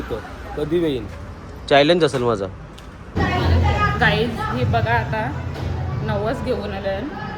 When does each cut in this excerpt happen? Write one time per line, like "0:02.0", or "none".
0:03.1